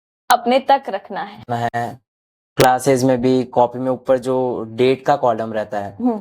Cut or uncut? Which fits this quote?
cut